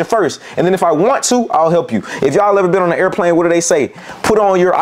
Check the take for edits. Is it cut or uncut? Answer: uncut